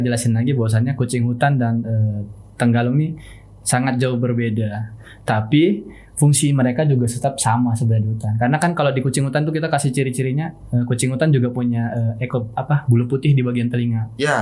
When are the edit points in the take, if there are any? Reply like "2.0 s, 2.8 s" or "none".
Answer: none